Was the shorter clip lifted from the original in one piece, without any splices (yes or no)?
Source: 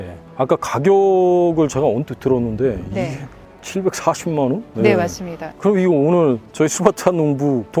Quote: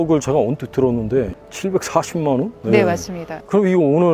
no